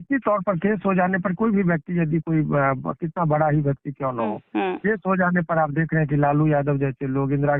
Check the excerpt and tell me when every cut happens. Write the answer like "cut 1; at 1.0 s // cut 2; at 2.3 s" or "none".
none

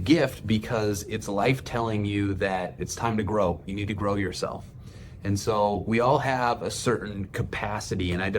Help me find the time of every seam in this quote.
cut 1; at 3.6 s

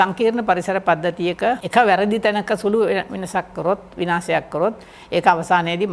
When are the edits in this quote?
cut 1; at 1.6 s

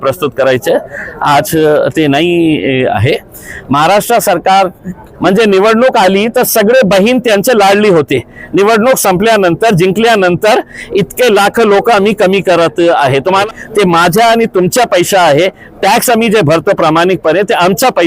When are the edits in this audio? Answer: cut 1; at 5.0 s // cut 2; at 13.4 s

